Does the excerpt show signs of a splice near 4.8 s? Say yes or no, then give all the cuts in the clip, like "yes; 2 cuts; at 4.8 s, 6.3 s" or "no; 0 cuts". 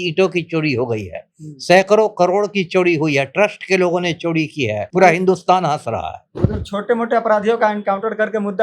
yes; 1 cut; at 4.8 s